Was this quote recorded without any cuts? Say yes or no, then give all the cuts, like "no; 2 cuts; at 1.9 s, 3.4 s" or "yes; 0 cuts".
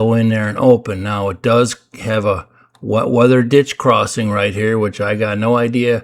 yes; 0 cuts